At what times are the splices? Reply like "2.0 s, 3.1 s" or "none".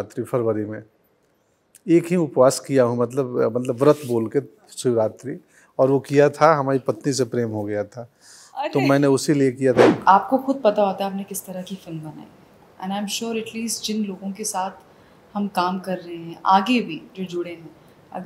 9.9 s

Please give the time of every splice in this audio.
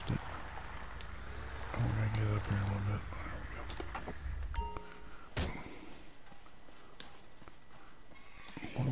none

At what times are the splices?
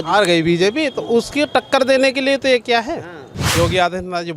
3.4 s

